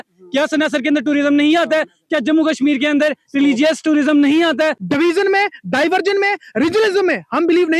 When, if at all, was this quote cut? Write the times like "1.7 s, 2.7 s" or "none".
4.8 s